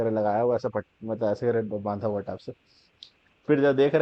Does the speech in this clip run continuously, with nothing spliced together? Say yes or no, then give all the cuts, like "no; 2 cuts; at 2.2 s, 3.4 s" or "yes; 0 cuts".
yes; 0 cuts